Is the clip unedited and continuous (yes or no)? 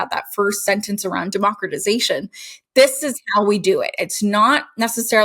no